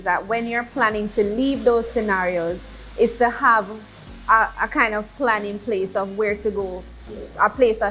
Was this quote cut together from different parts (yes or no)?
no